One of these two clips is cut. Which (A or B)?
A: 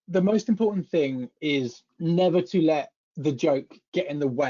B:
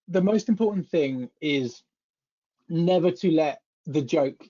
A